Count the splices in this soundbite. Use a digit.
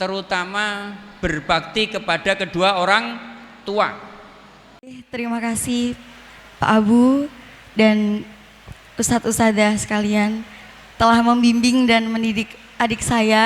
1